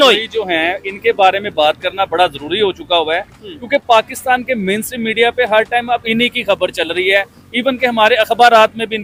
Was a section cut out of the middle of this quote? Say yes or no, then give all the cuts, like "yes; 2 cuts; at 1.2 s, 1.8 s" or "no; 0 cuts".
no; 0 cuts